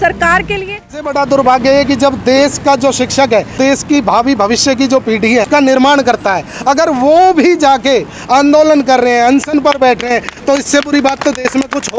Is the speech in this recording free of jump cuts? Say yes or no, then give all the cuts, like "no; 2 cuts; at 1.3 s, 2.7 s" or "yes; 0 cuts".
no; 3 cuts; at 1.0 s, 3.6 s, 5.5 s